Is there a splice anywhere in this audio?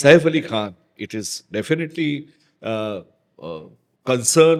no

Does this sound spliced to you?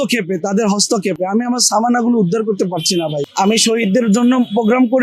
no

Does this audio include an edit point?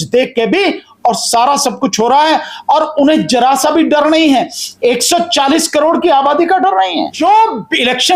yes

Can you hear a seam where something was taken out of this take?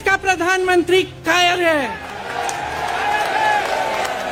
no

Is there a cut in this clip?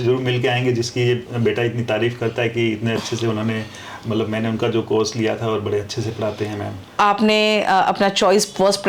yes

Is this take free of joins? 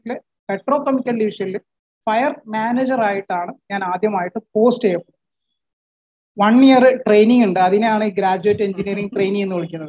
yes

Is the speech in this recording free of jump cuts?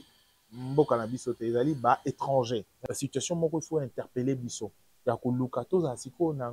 no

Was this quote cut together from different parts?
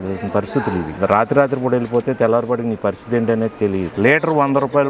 yes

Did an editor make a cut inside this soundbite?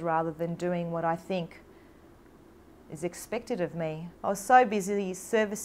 yes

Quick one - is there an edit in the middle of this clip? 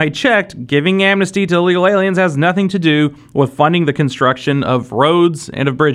no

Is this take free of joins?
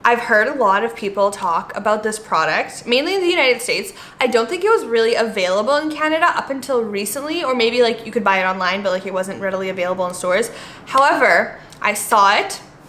yes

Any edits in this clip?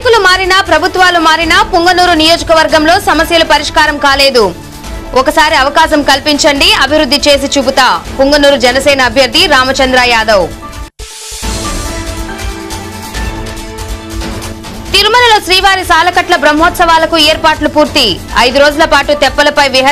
no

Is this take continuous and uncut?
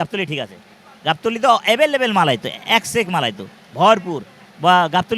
yes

